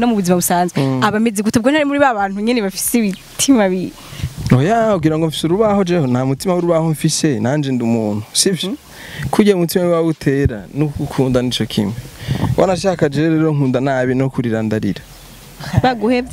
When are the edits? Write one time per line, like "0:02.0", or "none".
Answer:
none